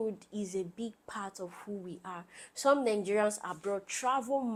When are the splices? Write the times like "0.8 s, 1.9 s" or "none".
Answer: none